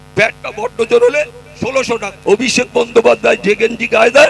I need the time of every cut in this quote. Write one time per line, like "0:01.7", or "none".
0:02.1